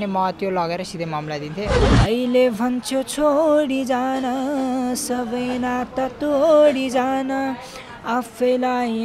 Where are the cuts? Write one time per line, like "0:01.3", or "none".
0:01.8

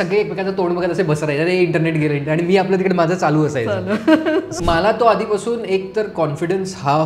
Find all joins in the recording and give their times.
0:04.5

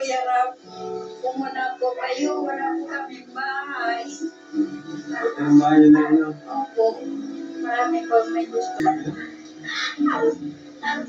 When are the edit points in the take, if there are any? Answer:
0:08.8

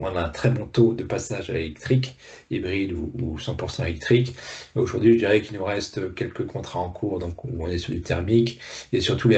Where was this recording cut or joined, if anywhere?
none

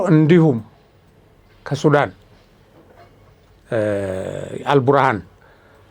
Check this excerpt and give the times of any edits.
none

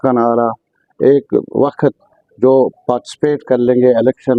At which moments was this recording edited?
none

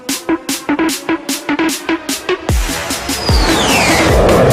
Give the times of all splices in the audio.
none

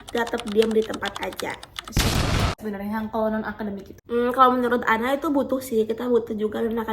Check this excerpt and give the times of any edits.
0:02.6
0:03.9

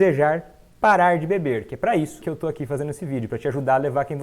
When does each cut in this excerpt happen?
0:02.2

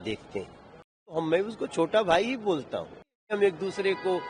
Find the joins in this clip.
0:01.3
0:03.3

